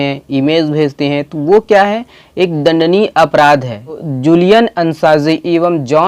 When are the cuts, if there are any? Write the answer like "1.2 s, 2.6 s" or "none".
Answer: 4.1 s